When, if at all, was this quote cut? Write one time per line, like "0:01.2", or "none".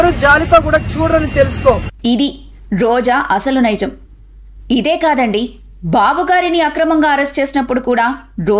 0:01.8